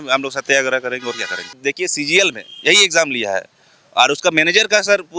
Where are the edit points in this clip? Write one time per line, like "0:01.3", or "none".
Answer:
0:01.6

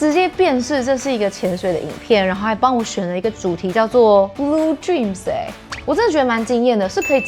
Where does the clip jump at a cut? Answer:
0:04.3
0:05.7

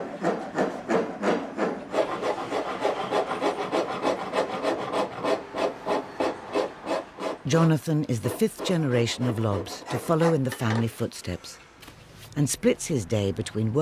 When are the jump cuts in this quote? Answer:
none

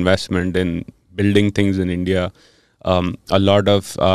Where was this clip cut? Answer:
none

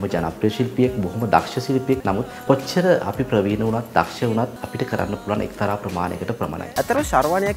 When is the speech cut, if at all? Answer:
0:02.0
0:04.6
0:06.7

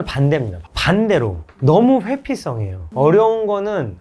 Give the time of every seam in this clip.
none

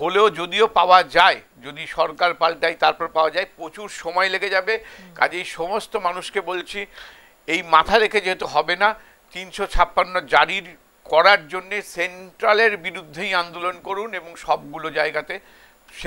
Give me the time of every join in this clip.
none

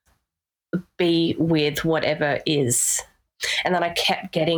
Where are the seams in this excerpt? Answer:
0:03.5

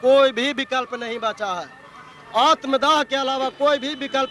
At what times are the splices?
none

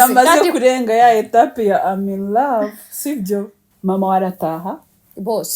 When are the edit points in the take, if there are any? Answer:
0:03.6

